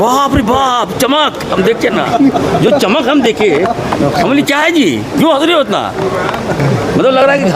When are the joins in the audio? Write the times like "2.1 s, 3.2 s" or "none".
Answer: none

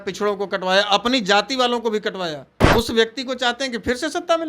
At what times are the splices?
2.5 s

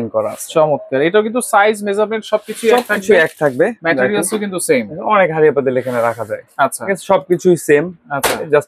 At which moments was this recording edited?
none

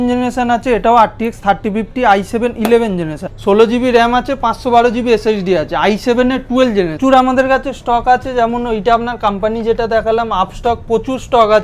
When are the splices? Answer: 3.3 s, 7.0 s

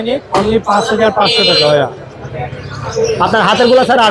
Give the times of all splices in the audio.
none

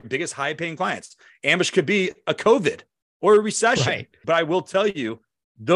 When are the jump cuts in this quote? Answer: 4.1 s

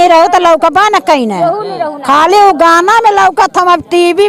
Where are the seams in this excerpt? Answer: none

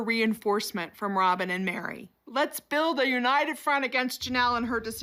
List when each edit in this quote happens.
none

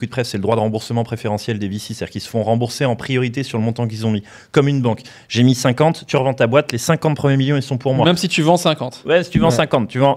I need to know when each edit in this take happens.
none

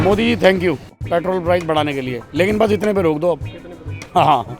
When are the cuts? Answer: 0.9 s

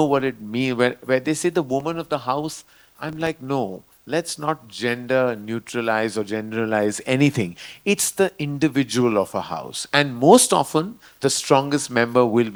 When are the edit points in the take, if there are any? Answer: none

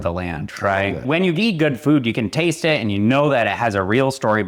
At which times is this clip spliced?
1.0 s

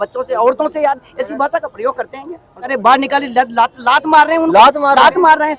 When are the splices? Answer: 2.7 s

